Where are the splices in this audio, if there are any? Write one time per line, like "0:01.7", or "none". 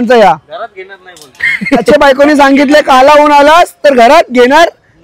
0:01.9

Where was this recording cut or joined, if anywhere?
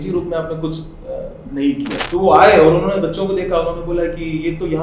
0:02.0

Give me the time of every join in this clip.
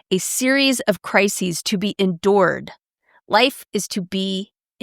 none

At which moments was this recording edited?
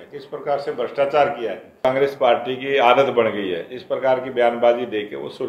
0:01.8

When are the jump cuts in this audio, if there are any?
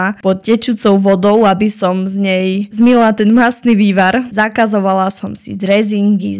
none

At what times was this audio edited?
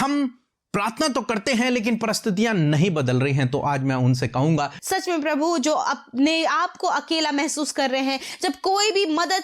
0:04.8

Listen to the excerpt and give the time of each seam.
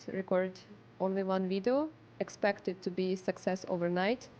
none

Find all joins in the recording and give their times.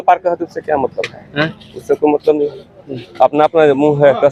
none

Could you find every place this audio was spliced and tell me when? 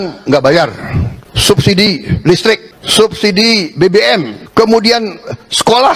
0:01.1
0:02.7
0:04.4

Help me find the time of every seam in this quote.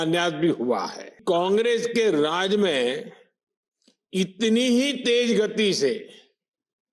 0:01.1

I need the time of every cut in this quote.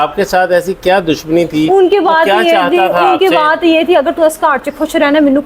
none

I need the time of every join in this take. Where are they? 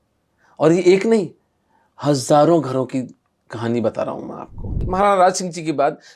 0:04.8

